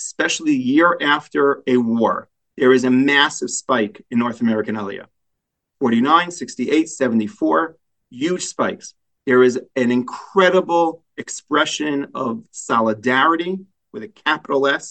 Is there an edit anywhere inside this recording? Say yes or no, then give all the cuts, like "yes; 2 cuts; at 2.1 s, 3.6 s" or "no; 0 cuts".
no; 0 cuts